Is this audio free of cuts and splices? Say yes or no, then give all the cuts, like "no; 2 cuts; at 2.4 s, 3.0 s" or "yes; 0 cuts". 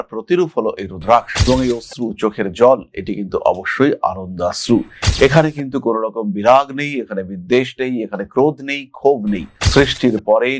yes; 0 cuts